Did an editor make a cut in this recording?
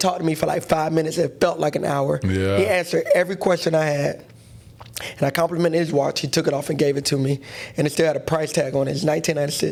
no; 0 cuts

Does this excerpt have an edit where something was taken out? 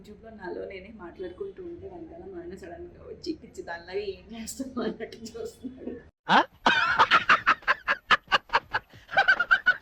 no; 0 cuts

